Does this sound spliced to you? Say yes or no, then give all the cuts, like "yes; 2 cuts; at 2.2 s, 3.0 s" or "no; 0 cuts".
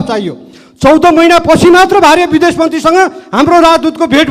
no; 0 cuts